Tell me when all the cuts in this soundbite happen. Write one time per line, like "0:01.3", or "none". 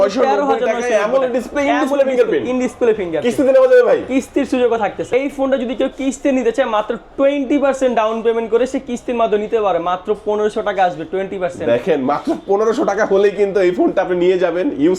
0:05.1